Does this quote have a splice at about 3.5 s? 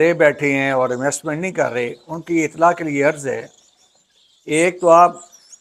no; 0 cuts

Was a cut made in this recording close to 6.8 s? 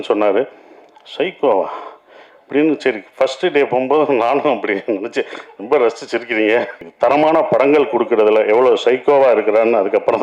yes; 1 cut; at 6.8 s

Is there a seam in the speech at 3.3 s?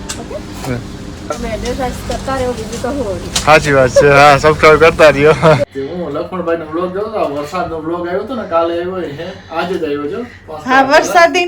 no; 2 cuts; at 1.4 s, 5.6 s

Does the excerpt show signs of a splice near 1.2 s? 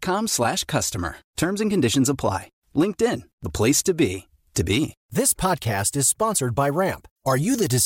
no; 1 cut; at 5.0 s

